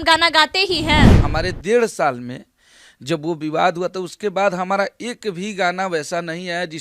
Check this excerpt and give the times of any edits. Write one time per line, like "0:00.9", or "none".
0:01.2